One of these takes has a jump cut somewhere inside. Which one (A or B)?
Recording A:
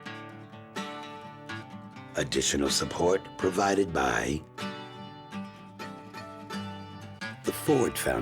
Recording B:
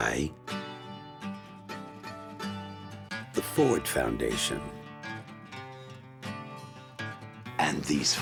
A